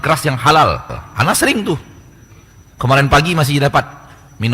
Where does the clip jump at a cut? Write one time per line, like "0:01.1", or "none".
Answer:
0:01.0